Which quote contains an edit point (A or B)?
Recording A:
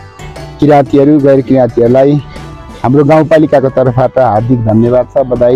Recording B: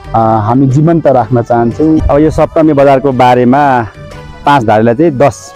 B